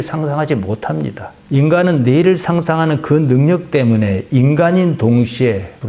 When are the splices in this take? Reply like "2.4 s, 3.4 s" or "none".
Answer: none